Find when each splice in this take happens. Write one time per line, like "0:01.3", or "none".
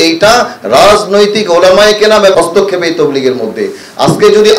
0:02.3

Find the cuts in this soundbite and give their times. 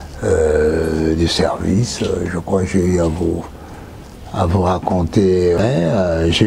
0:05.6

